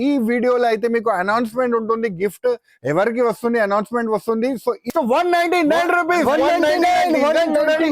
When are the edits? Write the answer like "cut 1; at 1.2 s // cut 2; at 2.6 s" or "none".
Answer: cut 1; at 4.9 s